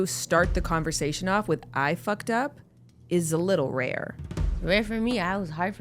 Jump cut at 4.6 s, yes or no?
yes